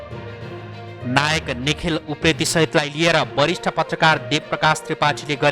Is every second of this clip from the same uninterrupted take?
no; 1 cut; at 1.0 s

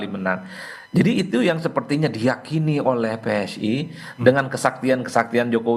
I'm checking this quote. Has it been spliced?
no; 0 cuts

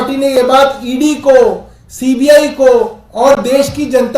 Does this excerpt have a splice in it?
no; 0 cuts

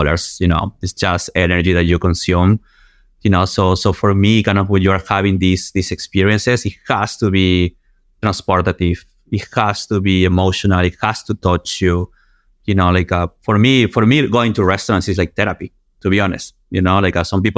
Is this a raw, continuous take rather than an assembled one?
yes; 0 cuts

